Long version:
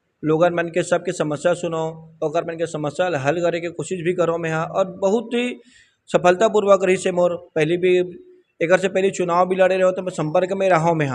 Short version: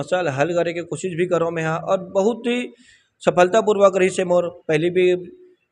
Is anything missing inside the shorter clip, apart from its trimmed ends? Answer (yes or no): no